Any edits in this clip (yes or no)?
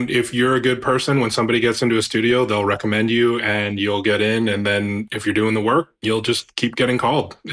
yes